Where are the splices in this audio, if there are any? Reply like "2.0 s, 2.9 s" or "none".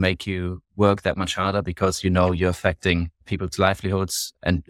3.2 s